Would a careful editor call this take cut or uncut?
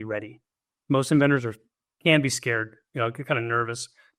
uncut